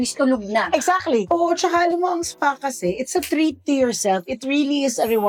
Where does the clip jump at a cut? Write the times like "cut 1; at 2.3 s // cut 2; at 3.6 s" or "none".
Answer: none